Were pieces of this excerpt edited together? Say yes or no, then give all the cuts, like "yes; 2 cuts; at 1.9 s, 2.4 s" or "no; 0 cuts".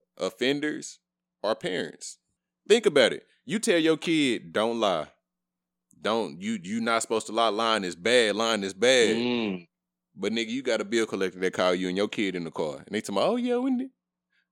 yes; 1 cut; at 1.9 s